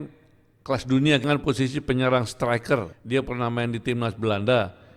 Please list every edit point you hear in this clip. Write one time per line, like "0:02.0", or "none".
0:01.2
0:03.0